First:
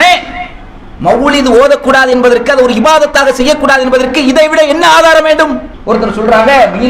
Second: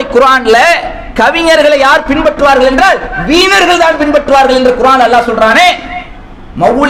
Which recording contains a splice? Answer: first; 1 cut; at 5.7 s

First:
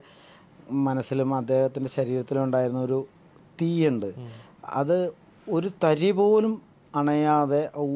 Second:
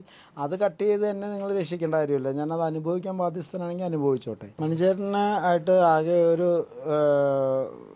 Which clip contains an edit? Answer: second; 1 cut; at 4.5 s

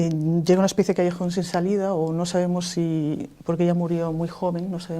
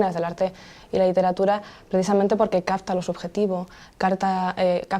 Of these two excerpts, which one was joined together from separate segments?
first; 1 cut; at 1.6 s

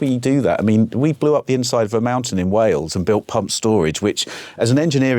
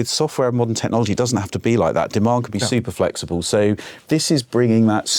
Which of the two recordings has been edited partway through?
second; 1 cut; at 3.9 s

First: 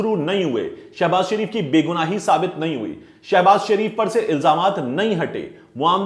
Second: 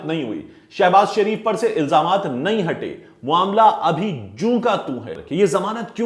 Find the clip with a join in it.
second; 1 cut; at 5.2 s

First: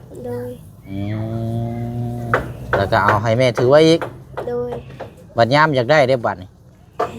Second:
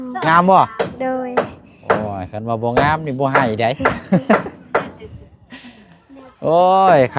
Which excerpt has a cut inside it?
first; 1 cut; at 2.3 s

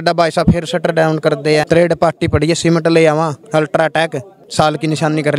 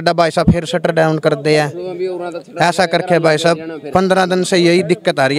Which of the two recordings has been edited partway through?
first; 3 cuts; at 1.7 s, 3.4 s, 4.4 s

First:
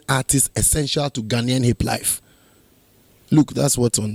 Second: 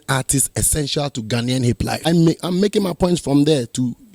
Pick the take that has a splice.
second; 1 cut; at 2.1 s

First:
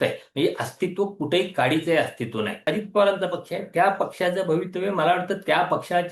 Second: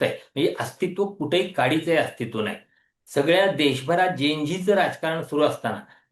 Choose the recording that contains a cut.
first; 1 cut; at 2.7 s

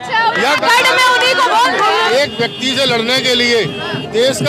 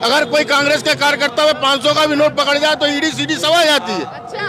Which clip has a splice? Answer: first; 1 cut; at 2.1 s

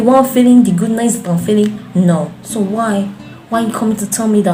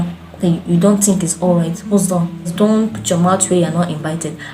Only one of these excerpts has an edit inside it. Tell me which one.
second; 1 cut; at 2.5 s

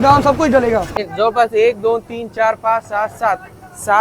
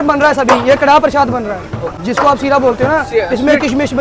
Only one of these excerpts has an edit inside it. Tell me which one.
first; 1 cut; at 0.9 s

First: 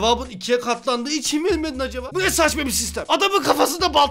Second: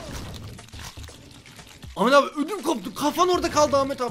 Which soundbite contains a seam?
first; 2 cuts; at 2.0 s, 2.9 s

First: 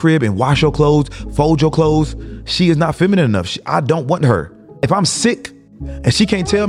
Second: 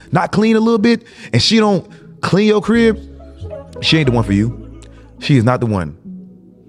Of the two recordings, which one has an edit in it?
first; 1 cut; at 4.8 s

